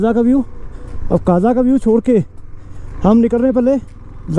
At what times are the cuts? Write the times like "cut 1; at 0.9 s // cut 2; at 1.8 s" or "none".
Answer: none